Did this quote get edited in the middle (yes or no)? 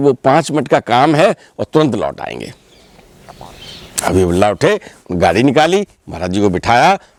no